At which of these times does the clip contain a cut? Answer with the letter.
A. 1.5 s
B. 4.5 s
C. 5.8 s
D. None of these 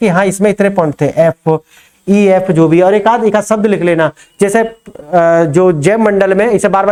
D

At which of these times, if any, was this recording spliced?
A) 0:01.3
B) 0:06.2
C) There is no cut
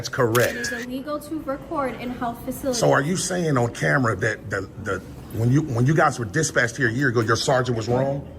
C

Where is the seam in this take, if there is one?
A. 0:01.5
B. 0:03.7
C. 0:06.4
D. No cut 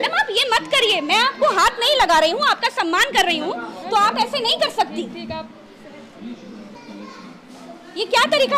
D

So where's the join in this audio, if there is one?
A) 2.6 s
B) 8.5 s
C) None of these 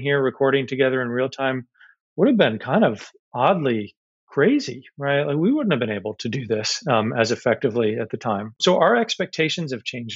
B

